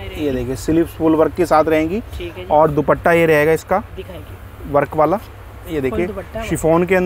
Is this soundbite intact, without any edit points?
yes; 0 cuts

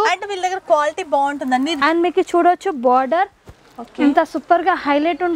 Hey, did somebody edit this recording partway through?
yes; 1 cut; at 1.8 s

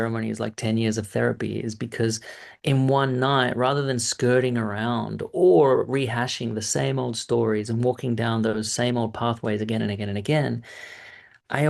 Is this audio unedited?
yes; 0 cuts

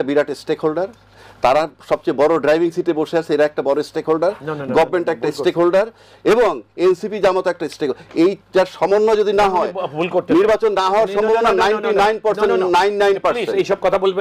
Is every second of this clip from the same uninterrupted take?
yes; 0 cuts

